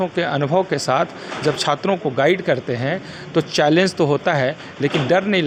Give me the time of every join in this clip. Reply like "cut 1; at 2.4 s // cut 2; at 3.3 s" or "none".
none